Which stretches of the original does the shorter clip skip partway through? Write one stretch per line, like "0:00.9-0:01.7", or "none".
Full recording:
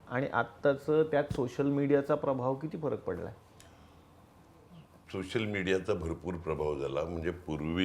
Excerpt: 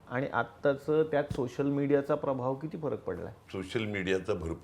0:03.4-0:05.0